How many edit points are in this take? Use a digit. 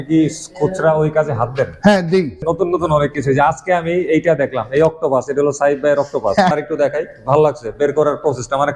2